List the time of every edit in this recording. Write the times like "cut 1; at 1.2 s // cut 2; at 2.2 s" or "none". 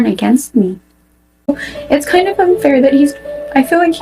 cut 1; at 1.5 s